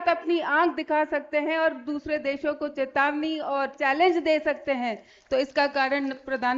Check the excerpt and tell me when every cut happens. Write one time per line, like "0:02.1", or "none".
none